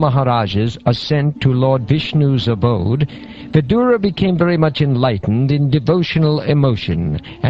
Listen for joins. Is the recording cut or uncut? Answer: cut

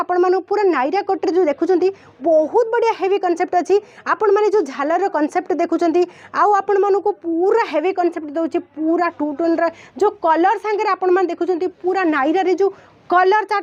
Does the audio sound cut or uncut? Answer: uncut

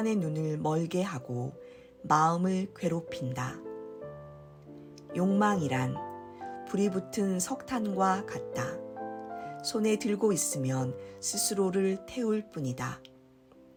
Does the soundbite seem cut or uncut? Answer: uncut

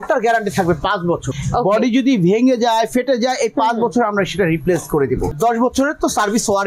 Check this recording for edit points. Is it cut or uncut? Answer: cut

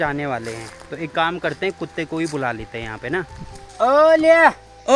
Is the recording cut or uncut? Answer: uncut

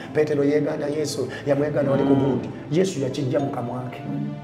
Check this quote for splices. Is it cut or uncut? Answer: uncut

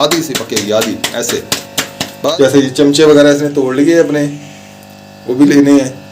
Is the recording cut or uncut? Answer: cut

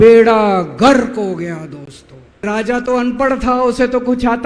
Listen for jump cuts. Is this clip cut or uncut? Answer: cut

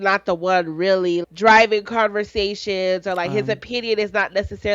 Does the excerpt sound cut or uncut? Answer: cut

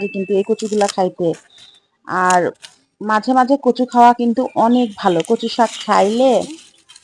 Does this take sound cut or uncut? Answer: uncut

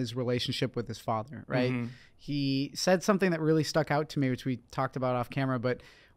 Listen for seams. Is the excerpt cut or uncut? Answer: uncut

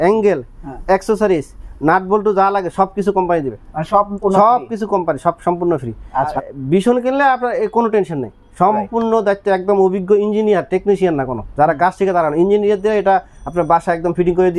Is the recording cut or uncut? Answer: cut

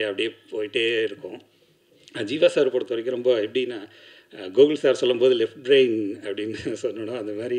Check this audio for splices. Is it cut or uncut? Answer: uncut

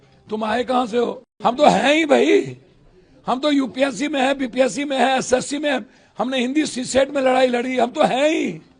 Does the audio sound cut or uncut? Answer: cut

